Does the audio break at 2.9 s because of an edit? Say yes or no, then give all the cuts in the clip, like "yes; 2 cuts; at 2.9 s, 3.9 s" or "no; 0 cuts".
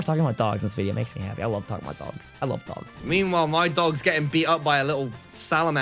yes; 1 cut; at 2.9 s